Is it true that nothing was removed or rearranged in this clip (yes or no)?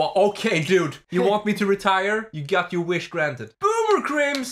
no